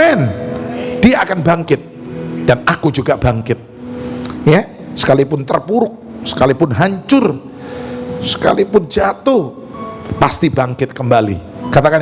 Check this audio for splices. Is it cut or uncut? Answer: uncut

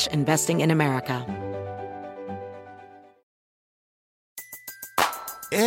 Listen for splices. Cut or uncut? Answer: cut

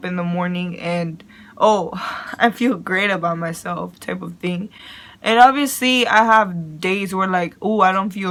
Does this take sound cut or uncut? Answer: uncut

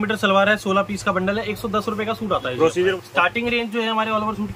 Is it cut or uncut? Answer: cut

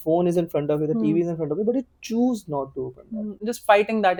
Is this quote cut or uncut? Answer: uncut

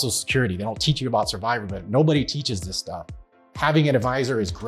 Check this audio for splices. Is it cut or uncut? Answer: cut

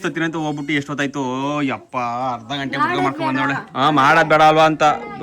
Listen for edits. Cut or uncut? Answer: uncut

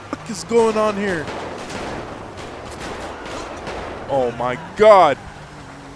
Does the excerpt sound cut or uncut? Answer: uncut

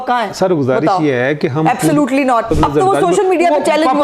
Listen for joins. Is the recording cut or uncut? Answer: cut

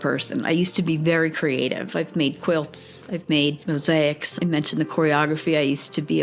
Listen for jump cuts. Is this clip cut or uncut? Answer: uncut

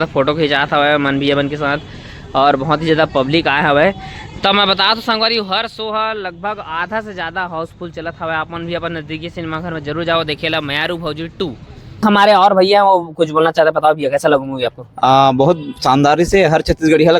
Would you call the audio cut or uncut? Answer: uncut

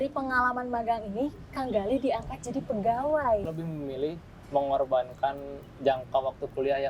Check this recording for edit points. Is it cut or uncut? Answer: cut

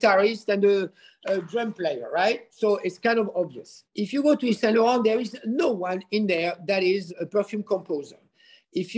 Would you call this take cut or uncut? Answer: cut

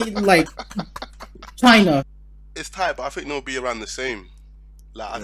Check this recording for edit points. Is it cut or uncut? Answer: cut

